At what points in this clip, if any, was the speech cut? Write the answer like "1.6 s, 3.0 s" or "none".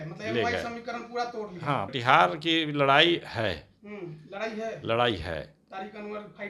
1.9 s